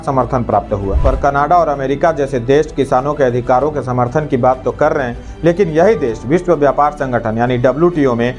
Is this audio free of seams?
no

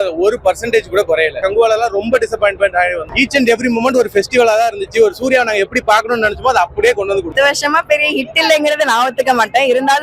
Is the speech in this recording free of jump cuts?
no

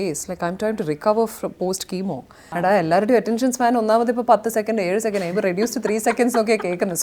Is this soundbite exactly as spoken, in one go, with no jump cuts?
no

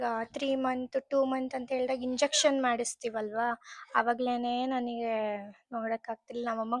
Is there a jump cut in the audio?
no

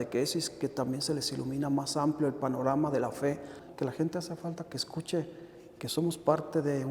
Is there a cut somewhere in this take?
yes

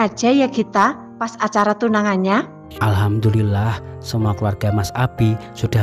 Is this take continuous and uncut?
no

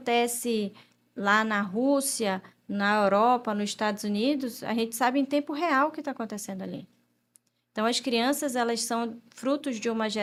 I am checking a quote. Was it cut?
no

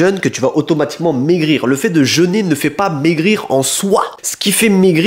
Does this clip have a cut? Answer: no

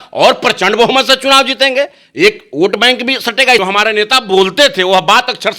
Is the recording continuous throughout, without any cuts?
no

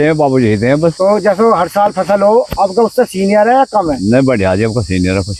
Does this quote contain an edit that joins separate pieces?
yes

